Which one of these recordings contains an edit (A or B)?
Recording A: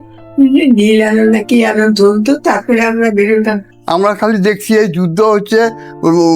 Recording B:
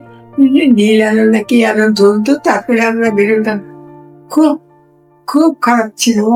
A